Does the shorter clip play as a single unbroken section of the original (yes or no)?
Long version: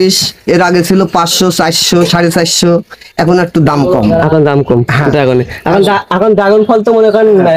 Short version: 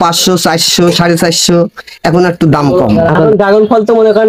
no